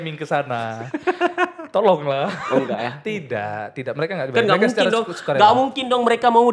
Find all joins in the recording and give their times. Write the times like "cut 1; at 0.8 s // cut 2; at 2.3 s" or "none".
none